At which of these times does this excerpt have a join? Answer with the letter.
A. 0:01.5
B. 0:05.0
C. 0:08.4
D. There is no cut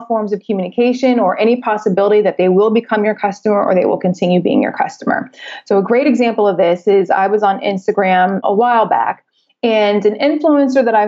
C